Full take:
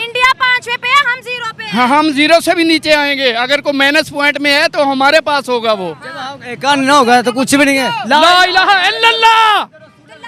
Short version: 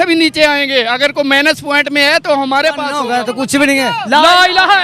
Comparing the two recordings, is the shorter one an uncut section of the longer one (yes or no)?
no